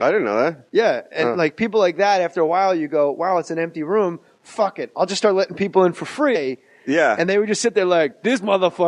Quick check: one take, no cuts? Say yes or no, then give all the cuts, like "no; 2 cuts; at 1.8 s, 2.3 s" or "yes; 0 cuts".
yes; 0 cuts